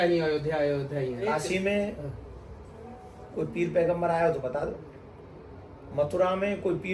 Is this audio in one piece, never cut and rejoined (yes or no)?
no